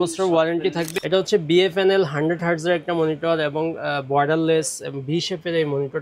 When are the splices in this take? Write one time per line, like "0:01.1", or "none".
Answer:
0:00.9